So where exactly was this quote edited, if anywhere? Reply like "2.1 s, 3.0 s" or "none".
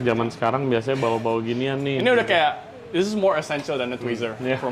none